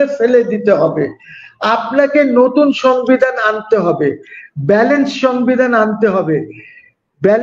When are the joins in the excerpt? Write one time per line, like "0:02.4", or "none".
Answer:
none